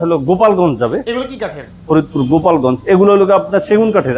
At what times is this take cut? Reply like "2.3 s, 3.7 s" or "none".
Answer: none